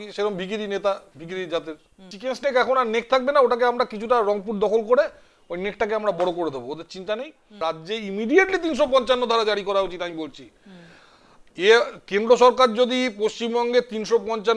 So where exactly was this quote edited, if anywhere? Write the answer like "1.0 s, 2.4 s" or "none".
2.1 s, 7.6 s